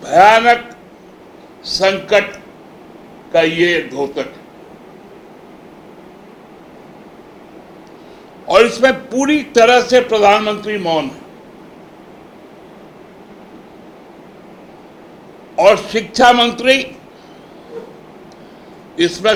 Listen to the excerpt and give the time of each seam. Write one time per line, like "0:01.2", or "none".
none